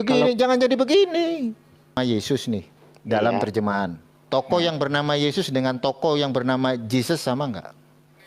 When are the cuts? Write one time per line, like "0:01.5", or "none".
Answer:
0:02.0